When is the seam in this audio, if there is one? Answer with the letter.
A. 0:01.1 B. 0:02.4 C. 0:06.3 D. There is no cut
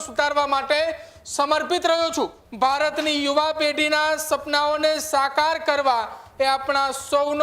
B